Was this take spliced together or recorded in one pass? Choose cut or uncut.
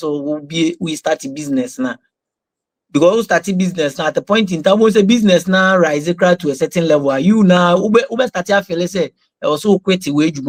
uncut